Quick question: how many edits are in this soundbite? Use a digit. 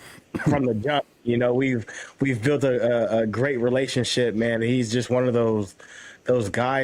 0